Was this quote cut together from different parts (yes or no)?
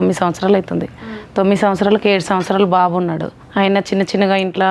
yes